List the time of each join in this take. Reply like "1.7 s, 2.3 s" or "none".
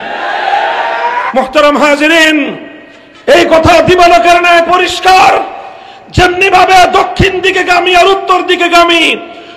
1.3 s

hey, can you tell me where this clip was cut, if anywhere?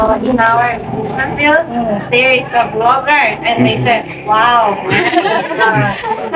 none

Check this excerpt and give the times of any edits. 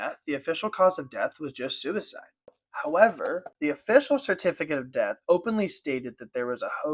2.6 s, 3.5 s

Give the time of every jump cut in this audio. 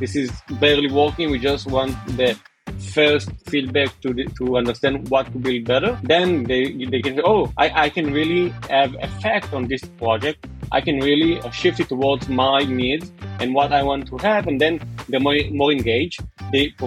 none

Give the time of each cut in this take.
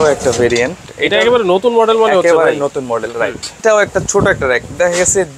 0.9 s, 3.6 s

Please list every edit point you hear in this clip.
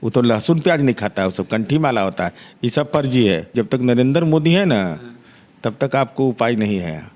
3.5 s

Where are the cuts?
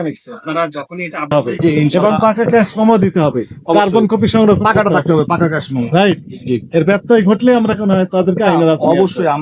1.3 s

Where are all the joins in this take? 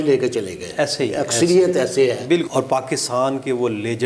2.5 s

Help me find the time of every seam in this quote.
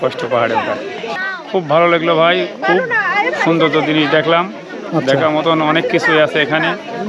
1.1 s

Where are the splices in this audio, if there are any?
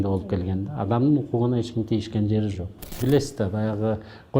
3.0 s

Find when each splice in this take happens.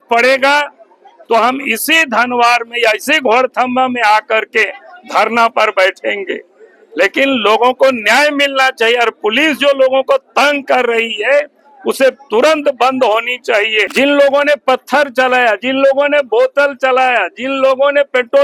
13.8 s

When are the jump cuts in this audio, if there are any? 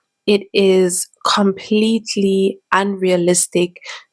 none

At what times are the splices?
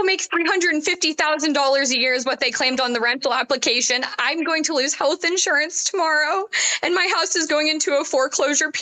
none

